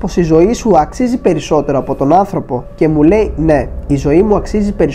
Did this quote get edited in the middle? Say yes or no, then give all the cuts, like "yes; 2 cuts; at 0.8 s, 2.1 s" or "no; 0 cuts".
no; 0 cuts